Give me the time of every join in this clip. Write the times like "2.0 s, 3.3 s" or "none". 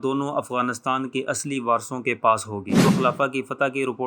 2.8 s